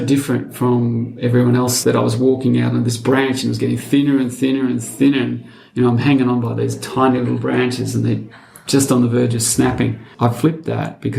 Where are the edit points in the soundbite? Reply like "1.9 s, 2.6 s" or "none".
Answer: 1.8 s, 10.0 s